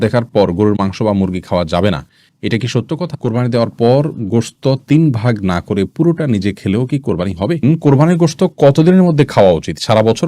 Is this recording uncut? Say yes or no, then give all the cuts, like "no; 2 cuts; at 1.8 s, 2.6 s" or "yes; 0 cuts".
no; 2 cuts; at 3.1 s, 7.6 s